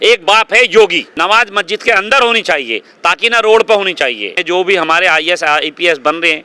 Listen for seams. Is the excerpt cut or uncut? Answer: cut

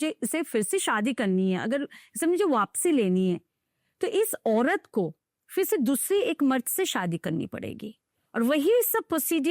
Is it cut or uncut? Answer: uncut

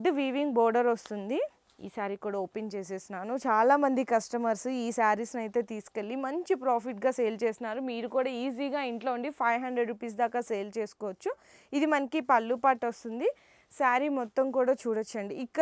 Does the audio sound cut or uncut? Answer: uncut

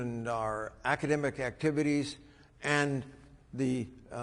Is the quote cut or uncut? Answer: uncut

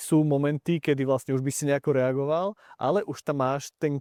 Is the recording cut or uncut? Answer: uncut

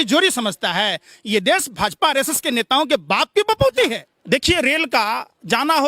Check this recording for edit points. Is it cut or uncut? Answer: cut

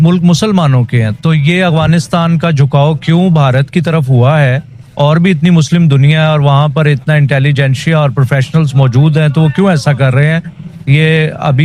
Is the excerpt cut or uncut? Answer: uncut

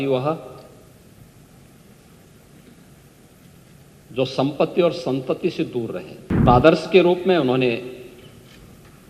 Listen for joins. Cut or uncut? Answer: cut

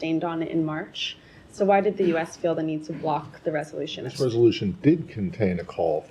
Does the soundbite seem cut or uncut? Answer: cut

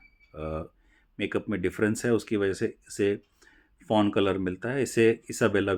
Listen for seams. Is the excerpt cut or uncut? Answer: uncut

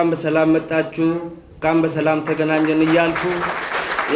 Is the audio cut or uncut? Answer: uncut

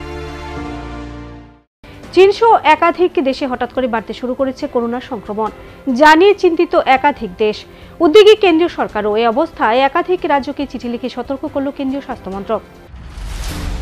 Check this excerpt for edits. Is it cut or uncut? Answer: uncut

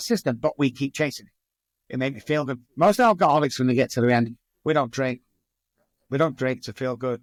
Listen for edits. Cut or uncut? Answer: uncut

